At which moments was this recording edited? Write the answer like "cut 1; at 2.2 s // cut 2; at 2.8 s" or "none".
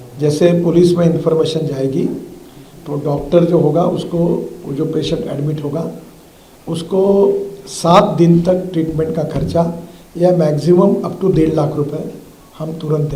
none